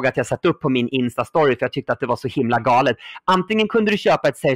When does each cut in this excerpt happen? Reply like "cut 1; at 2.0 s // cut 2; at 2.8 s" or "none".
none

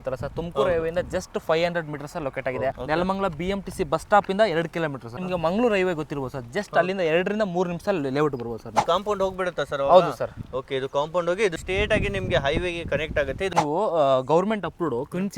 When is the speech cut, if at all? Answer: cut 1; at 2.7 s // cut 2; at 5.2 s // cut 3; at 8.8 s // cut 4; at 11.6 s // cut 5; at 13.5 s

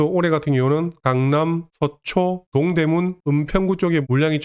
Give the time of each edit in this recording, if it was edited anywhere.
none

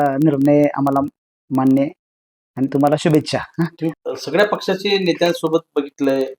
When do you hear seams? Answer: cut 1; at 3.9 s

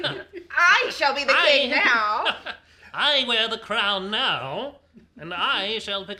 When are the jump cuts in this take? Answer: none

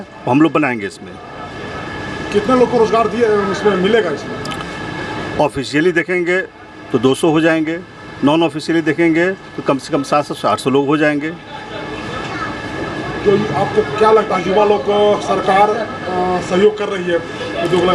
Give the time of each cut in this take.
none

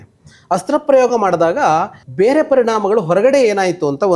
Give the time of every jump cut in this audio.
cut 1; at 2.0 s

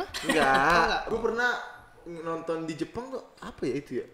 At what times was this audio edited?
cut 1; at 1.1 s

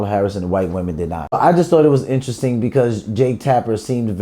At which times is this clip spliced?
cut 1; at 1.3 s

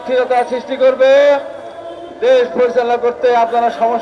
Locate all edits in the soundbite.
none

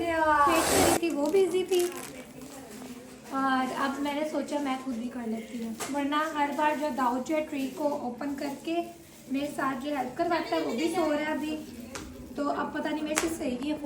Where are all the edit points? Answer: cut 1; at 1.0 s

